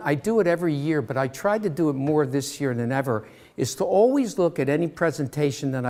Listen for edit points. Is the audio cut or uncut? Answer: uncut